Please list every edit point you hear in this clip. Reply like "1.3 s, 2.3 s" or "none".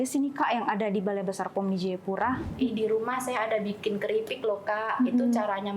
2.5 s